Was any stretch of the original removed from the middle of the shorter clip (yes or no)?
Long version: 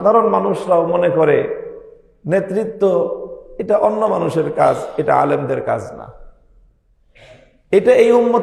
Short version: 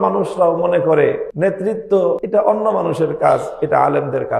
yes